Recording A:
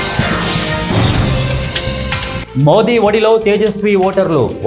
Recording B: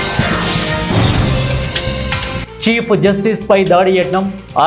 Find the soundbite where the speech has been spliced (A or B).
A